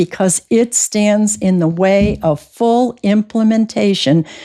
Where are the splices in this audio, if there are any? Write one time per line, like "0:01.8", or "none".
none